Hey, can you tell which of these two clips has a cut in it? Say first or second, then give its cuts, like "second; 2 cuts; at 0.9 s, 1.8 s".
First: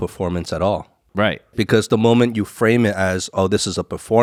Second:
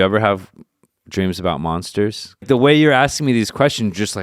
second; 1 cut; at 2.3 s